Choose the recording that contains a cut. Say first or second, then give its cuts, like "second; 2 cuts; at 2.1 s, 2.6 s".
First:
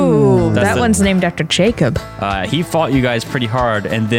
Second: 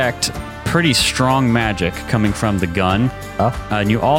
first; 1 cut; at 2.1 s